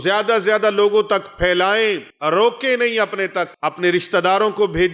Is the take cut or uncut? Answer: cut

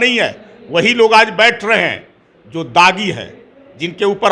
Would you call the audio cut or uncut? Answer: uncut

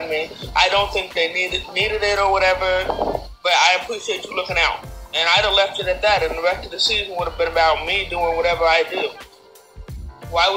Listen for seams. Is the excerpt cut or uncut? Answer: uncut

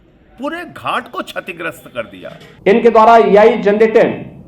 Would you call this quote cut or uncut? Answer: cut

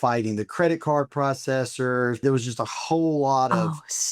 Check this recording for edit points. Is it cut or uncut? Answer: cut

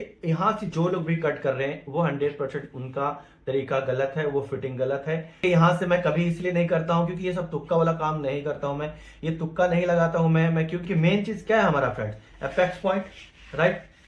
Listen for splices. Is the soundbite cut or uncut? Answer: cut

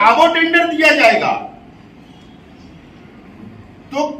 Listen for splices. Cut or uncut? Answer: uncut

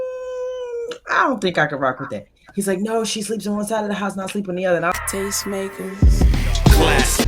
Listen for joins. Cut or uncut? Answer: cut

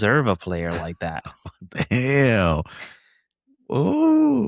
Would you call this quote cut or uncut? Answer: uncut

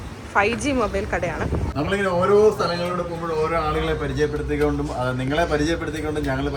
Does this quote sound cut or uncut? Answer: cut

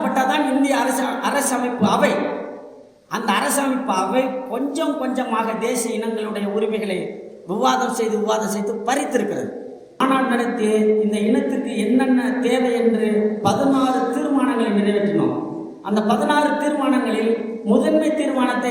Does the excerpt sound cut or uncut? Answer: cut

